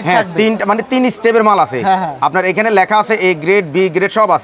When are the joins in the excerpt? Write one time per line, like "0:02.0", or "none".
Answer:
none

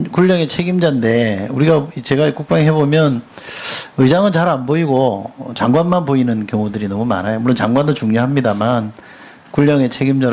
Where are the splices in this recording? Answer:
0:03.4

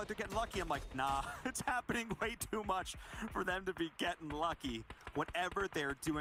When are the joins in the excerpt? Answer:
none

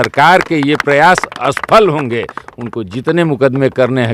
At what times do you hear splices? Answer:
none

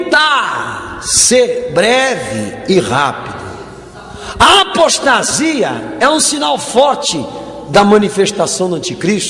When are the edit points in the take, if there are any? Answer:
0:07.3

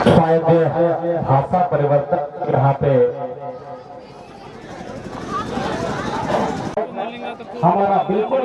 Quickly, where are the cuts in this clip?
0:06.8

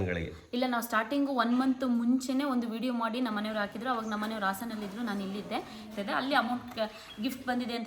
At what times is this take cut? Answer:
0:05.9

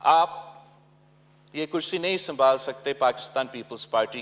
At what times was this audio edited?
none

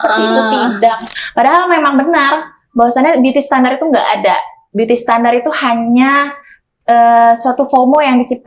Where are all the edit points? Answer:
0:01.1

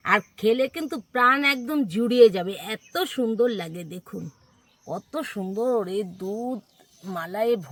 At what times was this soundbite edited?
none

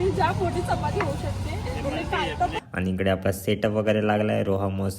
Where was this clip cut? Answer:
0:02.6

